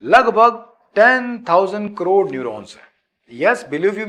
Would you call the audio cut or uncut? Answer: uncut